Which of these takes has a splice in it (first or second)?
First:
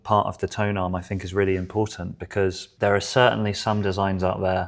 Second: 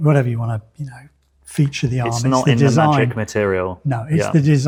first